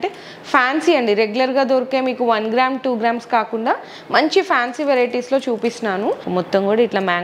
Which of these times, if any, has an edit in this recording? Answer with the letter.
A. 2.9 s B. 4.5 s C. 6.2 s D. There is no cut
C